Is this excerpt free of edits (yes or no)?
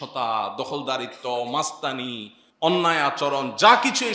yes